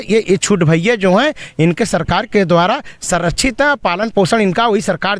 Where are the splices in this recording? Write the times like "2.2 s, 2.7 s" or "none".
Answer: none